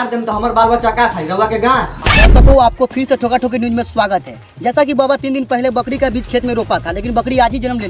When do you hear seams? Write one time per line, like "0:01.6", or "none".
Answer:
0:02.2